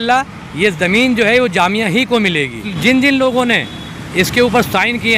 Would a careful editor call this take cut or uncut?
cut